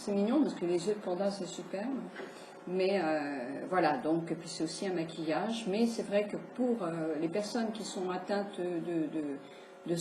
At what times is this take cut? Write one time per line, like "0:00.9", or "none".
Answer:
0:06.9